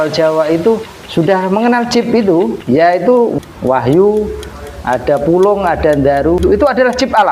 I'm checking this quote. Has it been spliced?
yes; 4 cuts; at 1.0 s, 2.6 s, 3.4 s, 6.4 s

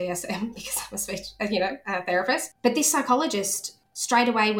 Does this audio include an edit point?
yes; 1 cut; at 2.4 s

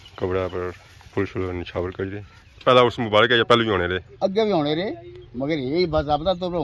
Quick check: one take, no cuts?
no; 1 cut; at 2.6 s

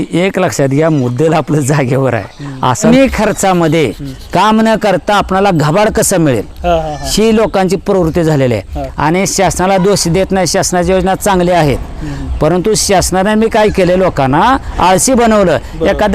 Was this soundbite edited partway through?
yes; 1 cut; at 2.8 s

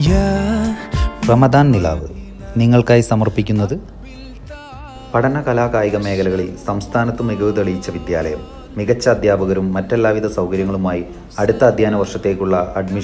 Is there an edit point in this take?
yes; 1 cut; at 1.0 s

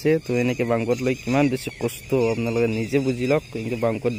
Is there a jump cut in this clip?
no; 0 cuts

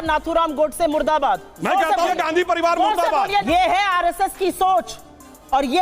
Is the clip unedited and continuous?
no; 2 cuts; at 2.1 s, 3.4 s

